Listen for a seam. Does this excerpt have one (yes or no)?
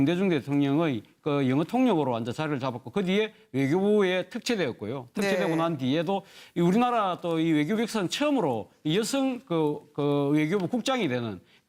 no